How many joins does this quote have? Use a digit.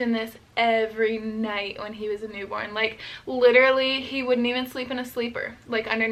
0